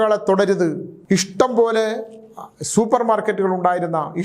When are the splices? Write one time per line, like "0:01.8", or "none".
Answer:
0:00.9